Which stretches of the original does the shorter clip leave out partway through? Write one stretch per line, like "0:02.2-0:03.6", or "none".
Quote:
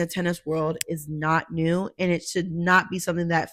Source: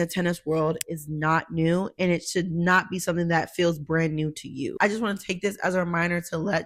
none